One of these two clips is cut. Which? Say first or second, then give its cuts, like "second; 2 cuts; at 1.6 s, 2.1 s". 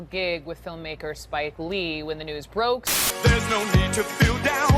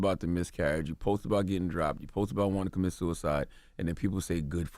first; 1 cut; at 2.9 s